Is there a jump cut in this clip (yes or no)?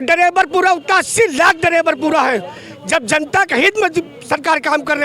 no